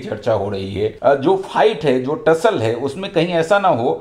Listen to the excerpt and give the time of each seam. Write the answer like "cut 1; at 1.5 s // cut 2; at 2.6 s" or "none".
cut 1; at 1.0 s